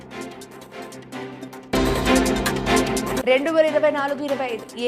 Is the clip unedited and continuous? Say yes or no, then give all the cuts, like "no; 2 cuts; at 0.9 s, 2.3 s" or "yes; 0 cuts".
no; 1 cut; at 1.0 s